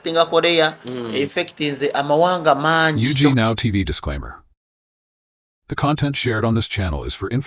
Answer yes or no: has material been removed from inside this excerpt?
yes